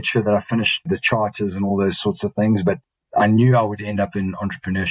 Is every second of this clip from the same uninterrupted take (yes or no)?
yes